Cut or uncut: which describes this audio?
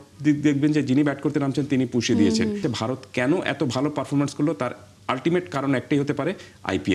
cut